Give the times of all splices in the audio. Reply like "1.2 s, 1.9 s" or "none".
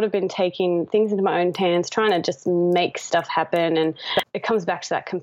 4.1 s